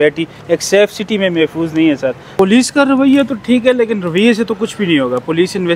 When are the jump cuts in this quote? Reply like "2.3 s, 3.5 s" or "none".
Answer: 2.2 s